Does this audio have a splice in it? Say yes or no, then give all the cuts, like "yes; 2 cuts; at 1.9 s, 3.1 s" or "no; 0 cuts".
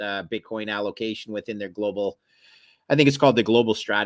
no; 0 cuts